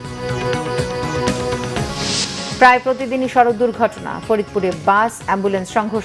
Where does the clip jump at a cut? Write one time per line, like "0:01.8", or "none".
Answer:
none